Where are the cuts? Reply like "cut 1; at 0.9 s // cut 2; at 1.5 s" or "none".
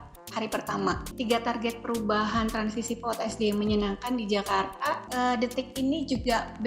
cut 1; at 1.1 s // cut 2; at 5.0 s

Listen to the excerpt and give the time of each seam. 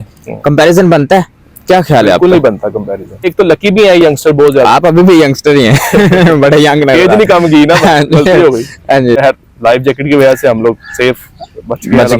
cut 1; at 3.3 s // cut 2; at 9.2 s

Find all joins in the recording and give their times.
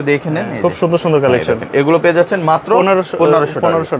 none

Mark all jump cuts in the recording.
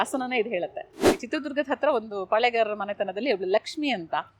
cut 1; at 1.1 s

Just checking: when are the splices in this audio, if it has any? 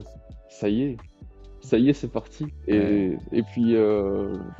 none

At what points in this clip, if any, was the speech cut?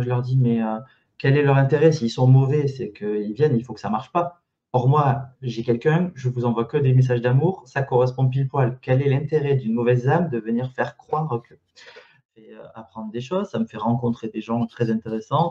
cut 1; at 12.2 s

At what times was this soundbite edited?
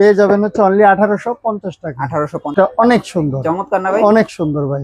cut 1; at 2.5 s

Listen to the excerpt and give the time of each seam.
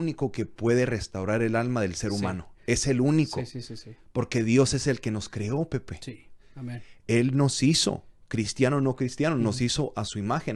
none

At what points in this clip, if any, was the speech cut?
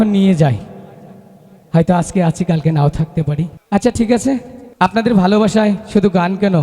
cut 1; at 3.6 s // cut 2; at 4.6 s

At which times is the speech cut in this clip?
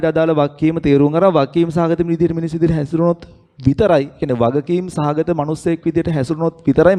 none

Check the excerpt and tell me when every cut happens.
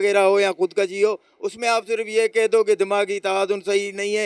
none

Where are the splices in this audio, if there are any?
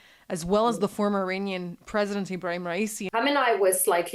cut 1; at 3.0 s

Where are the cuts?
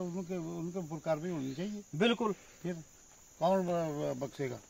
none

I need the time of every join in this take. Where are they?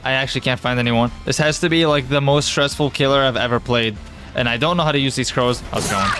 cut 1; at 1.2 s // cut 2; at 4.2 s

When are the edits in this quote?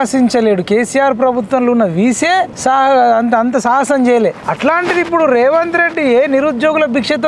cut 1; at 2.5 s // cut 2; at 4.5 s

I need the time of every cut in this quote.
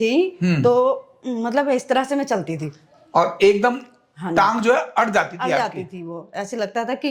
none

